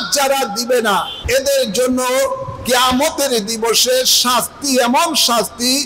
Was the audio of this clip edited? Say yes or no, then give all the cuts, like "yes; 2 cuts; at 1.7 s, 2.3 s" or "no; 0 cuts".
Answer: yes; 1 cut; at 1.1 s